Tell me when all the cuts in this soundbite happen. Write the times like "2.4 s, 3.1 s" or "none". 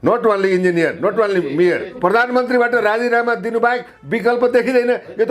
1.9 s